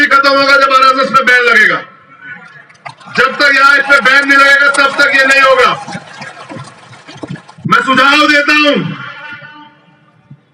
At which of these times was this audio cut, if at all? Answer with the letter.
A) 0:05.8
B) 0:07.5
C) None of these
B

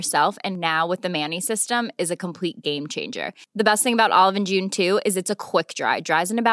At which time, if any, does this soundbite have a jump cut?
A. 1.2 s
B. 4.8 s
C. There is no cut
C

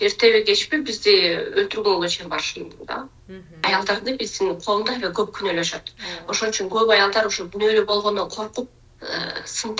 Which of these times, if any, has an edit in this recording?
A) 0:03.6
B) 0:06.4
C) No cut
A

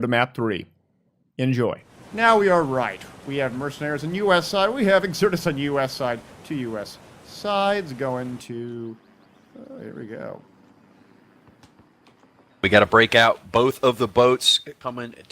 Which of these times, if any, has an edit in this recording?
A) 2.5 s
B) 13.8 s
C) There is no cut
B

